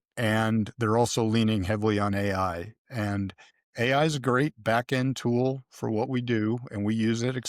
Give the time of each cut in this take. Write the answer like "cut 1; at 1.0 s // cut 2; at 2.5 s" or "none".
none